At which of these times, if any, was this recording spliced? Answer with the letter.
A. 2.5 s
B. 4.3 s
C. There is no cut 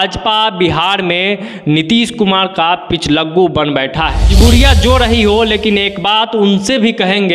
B